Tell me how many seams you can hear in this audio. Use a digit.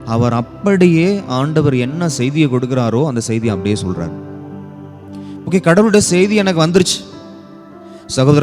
1